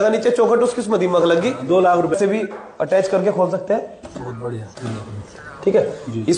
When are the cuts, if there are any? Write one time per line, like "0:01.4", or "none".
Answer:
0:02.2

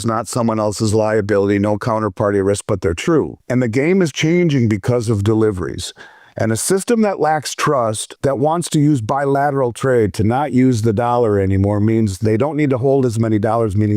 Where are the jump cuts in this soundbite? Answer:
0:03.4
0:08.1

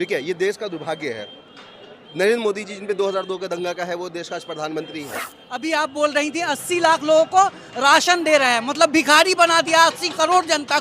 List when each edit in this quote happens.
0:05.5

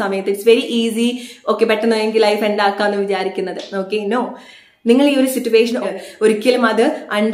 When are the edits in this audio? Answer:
0:05.8

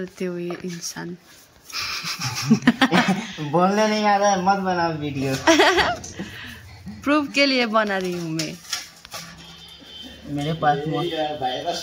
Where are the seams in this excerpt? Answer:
none

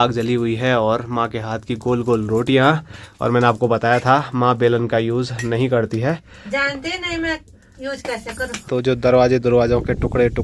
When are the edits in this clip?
0:08.6

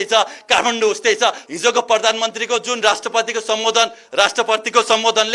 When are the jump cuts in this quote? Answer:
0:01.4

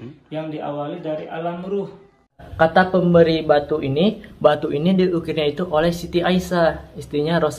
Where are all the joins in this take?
0:02.4

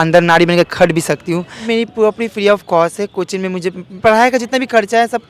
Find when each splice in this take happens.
0:01.6

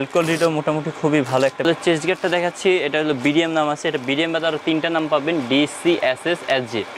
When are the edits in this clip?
0:01.6

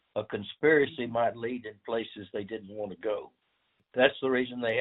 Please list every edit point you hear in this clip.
0:03.8

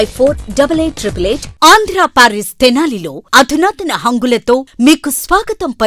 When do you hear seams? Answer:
none

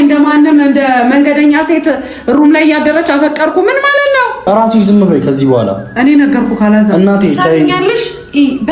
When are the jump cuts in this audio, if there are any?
0:04.4

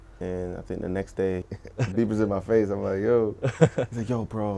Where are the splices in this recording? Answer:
0:01.6

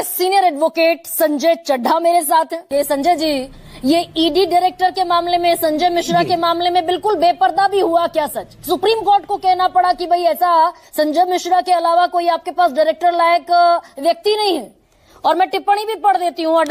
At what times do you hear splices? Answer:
0:02.7

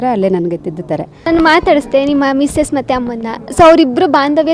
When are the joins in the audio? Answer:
0:01.3

